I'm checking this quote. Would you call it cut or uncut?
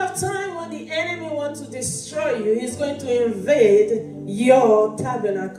uncut